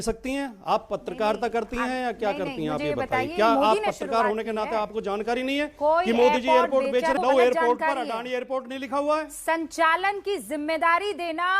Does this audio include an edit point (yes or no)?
yes